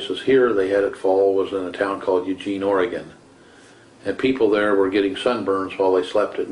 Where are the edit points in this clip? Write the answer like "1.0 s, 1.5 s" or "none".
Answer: 3.1 s